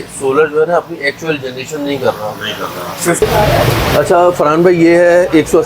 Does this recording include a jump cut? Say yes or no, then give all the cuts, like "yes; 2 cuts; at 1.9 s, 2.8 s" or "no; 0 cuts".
yes; 1 cut; at 3.2 s